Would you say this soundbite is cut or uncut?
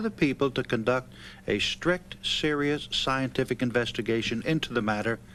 uncut